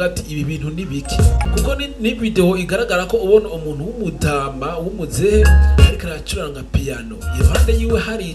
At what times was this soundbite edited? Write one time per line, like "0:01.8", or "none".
0:01.4

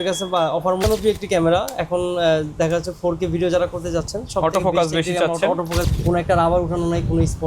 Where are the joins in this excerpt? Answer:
0:00.8
0:05.8

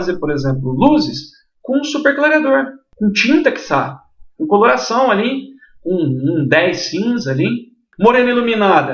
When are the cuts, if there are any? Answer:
0:02.8
0:07.8

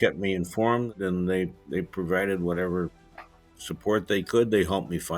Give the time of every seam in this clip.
0:00.9

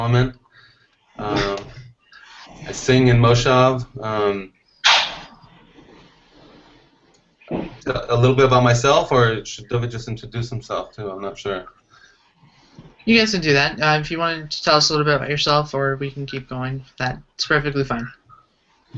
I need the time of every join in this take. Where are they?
0:13.2

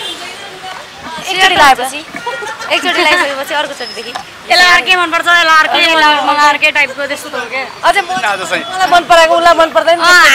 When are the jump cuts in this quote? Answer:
0:04.4

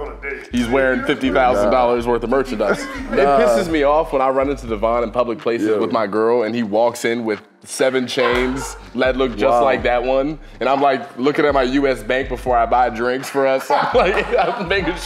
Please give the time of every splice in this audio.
0:03.1

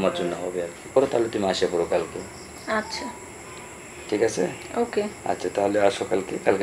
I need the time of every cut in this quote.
0:00.9

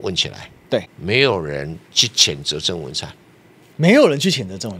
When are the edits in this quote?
0:00.9

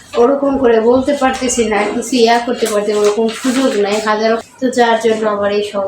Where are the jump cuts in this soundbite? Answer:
0:04.5

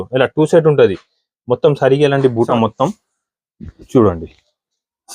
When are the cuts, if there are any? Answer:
0:02.5

